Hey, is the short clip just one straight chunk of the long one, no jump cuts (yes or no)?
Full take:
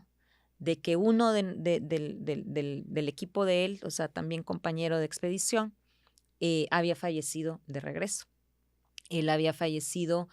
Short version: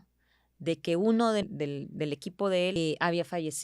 no